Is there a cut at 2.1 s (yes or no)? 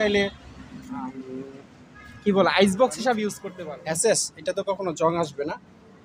no